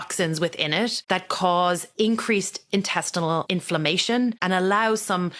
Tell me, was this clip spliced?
yes; 4 cuts; at 1.0 s, 1.9 s, 3.5 s, 4.4 s

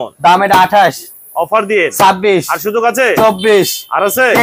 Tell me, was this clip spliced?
no; 0 cuts

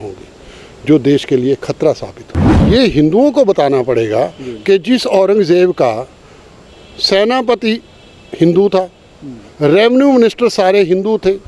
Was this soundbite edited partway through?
yes; 1 cut; at 2.5 s

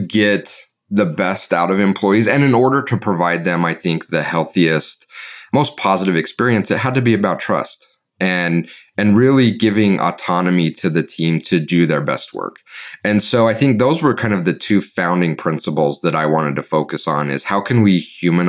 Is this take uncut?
yes; 0 cuts

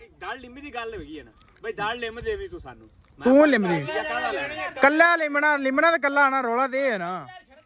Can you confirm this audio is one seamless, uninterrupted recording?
yes; 0 cuts

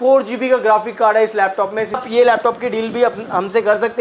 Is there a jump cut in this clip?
yes; 1 cut; at 2.0 s

